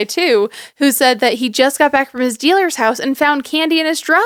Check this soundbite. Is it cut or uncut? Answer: uncut